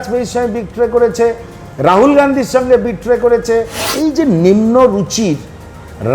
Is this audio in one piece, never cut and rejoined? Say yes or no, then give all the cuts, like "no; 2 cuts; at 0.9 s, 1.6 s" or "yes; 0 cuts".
no; 1 cut; at 3.8 s